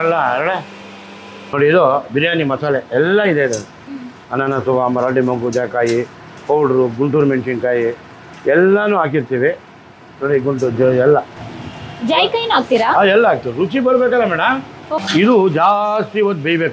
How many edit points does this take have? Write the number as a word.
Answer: two